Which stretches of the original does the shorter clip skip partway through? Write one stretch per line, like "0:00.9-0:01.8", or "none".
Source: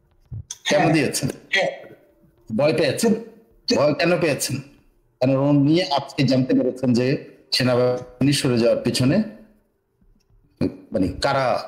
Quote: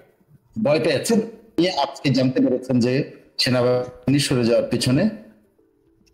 0:03.5-0:05.7